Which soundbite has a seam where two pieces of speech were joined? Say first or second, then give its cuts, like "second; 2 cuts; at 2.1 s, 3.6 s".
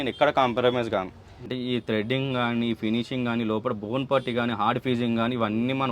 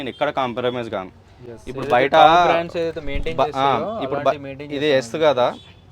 first; 1 cut; at 1.5 s